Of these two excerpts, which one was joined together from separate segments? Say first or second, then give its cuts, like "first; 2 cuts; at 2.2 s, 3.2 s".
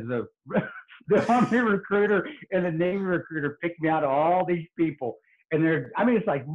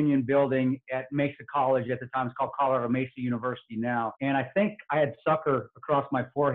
second; 1 cut; at 4.1 s